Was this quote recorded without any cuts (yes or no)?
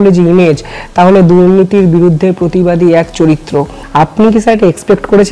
no